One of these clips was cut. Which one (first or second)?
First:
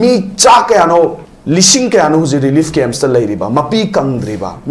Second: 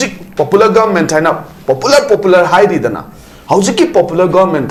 first